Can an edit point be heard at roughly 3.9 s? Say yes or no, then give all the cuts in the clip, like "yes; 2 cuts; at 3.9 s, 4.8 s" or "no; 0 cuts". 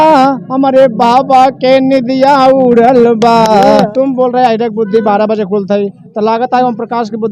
yes; 1 cut; at 3.9 s